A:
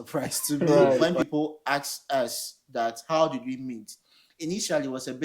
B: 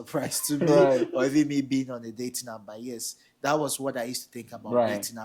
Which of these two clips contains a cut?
A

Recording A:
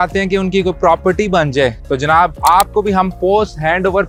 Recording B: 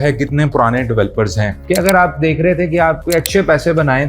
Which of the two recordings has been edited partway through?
B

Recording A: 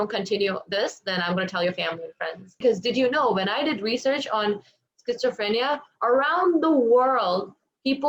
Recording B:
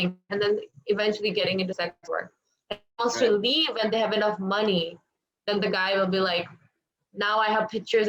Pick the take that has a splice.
A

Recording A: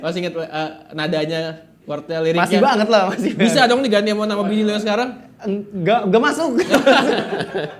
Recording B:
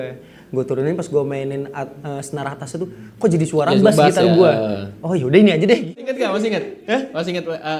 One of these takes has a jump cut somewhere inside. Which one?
B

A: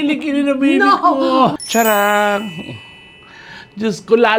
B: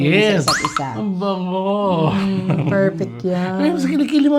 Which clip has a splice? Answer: A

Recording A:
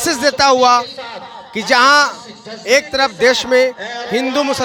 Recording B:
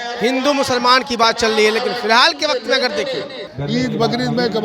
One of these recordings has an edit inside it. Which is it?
B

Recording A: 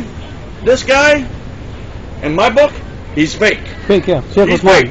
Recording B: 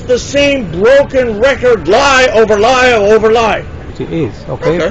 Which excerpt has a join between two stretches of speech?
B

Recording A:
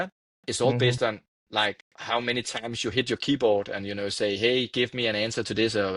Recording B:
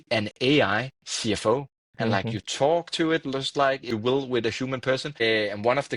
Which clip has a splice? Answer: B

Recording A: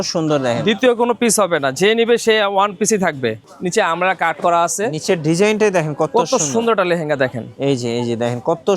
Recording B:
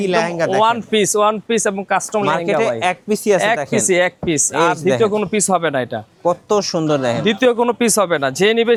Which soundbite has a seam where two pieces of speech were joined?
A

